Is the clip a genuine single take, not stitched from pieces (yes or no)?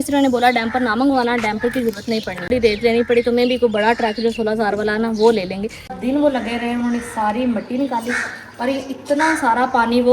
no